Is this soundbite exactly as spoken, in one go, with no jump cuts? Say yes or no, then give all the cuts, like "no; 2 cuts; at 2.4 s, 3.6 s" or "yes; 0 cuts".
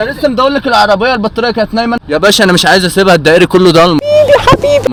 yes; 0 cuts